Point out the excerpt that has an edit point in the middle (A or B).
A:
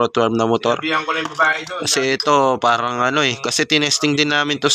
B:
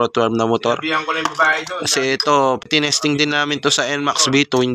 B